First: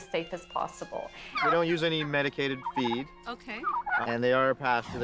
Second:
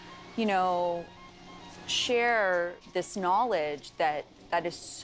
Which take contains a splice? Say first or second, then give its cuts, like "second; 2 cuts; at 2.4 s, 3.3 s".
first; 2 cuts; at 1.3 s, 4.0 s